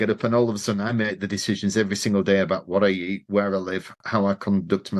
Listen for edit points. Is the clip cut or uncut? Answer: uncut